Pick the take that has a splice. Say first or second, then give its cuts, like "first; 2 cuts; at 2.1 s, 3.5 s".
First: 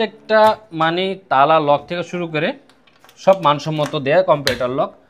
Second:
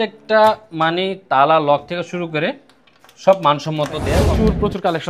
second; 1 cut; at 4.1 s